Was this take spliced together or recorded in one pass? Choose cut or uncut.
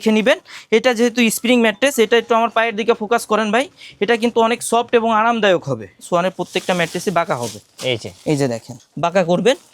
cut